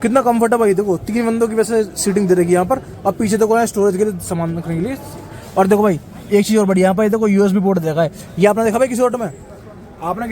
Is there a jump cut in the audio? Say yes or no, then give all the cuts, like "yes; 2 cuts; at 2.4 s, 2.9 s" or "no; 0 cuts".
no; 0 cuts